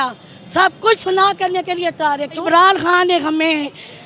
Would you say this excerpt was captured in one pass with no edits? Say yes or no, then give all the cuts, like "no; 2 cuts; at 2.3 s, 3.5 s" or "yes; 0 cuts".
no; 1 cut; at 2.4 s